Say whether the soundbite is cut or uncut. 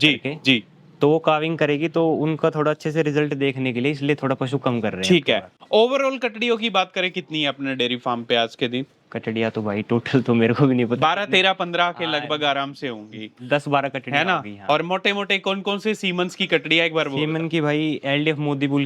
cut